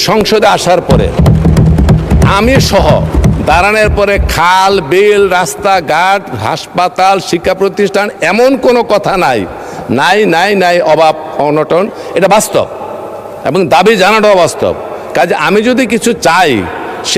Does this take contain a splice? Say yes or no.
no